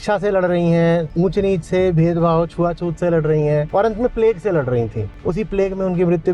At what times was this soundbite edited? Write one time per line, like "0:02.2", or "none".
0:01.1
0:03.7
0:05.1